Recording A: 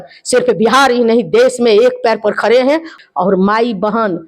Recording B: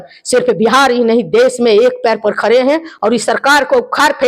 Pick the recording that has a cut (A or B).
A